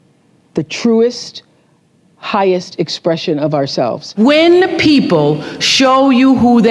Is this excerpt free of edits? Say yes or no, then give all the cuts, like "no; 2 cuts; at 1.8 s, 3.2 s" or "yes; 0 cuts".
no; 1 cut; at 4.0 s